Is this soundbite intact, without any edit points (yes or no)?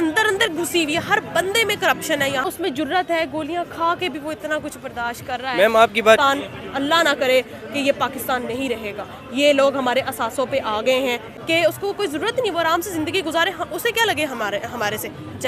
no